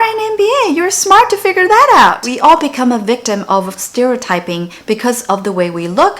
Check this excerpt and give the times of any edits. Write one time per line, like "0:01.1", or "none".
0:02.3